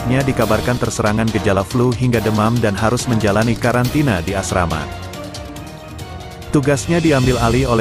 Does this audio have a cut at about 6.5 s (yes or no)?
yes